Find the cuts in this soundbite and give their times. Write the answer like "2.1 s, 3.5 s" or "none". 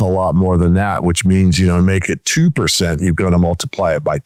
none